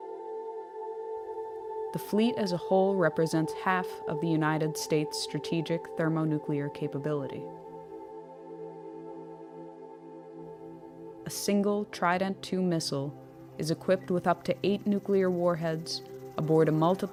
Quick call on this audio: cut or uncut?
uncut